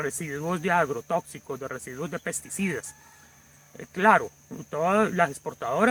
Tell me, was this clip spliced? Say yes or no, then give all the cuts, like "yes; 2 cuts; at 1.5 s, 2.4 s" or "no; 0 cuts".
no; 0 cuts